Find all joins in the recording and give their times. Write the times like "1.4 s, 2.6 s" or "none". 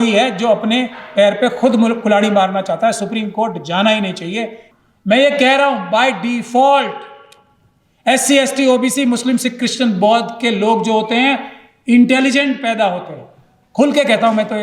4.6 s